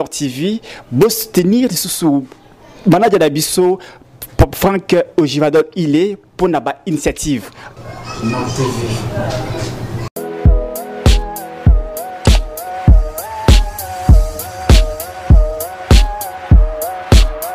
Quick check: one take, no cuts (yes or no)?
no